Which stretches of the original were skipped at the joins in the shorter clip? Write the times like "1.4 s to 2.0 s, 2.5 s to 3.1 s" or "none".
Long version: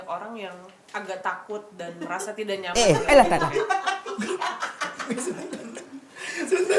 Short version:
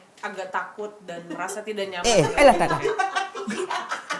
none